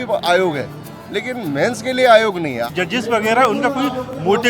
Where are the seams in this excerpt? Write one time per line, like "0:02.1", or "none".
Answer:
0:02.7